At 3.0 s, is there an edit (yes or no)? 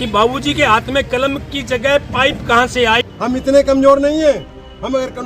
yes